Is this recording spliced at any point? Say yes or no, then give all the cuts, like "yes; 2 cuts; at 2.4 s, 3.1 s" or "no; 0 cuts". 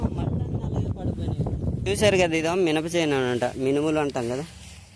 yes; 1 cut; at 2.0 s